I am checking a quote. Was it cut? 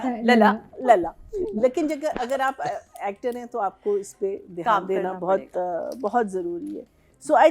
no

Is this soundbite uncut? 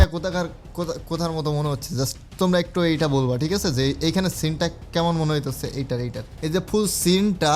no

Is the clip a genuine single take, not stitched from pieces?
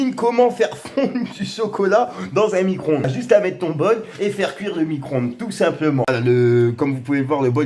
no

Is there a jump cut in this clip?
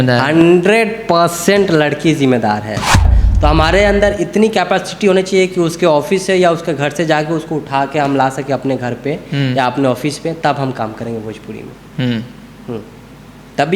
yes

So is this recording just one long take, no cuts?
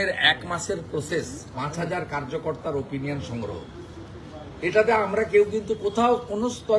yes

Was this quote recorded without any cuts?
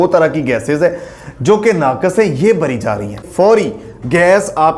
no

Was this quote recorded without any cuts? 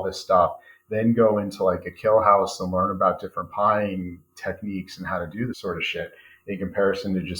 no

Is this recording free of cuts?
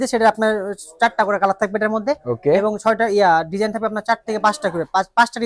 yes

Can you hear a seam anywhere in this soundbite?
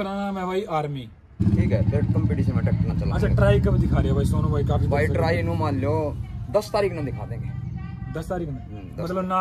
yes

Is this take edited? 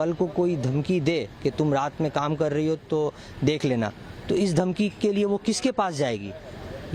no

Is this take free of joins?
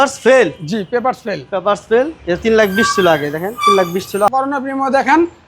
no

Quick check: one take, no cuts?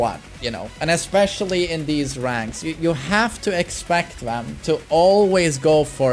yes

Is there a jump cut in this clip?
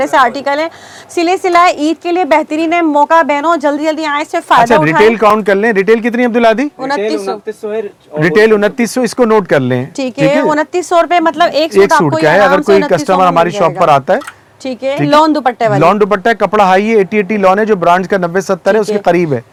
no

